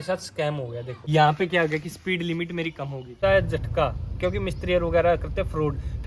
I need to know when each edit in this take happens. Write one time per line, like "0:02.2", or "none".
0:01.0
0:03.2